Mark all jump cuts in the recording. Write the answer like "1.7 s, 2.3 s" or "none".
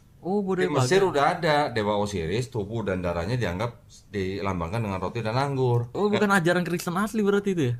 none